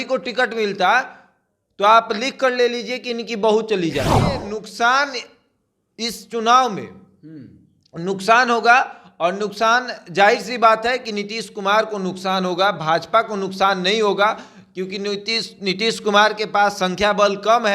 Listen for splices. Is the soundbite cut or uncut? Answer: cut